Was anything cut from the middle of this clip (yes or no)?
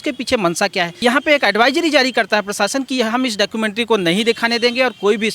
yes